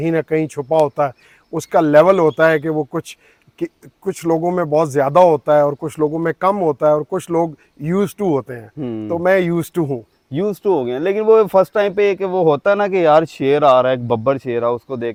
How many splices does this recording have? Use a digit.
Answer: 0